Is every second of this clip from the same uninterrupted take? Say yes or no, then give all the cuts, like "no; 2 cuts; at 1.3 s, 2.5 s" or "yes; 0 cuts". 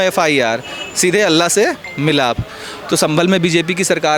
yes; 0 cuts